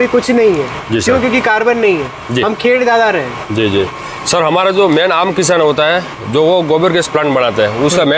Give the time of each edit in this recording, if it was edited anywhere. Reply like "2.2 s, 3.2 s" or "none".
3.9 s